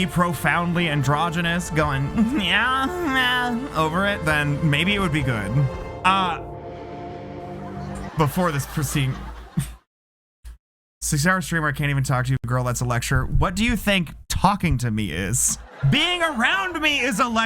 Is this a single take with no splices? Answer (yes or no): no